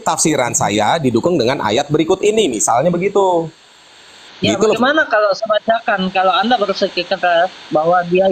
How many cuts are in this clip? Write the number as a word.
zero